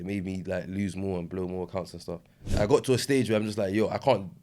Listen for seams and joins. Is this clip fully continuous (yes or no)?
no